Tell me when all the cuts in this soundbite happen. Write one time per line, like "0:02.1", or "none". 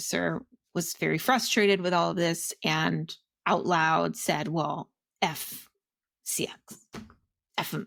none

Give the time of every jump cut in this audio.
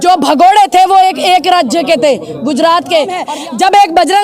0:03.2

